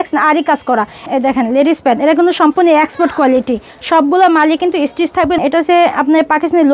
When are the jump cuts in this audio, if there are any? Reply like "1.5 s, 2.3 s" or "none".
1.1 s, 5.4 s